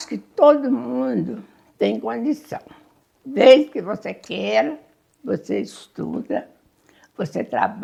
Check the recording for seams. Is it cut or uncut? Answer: uncut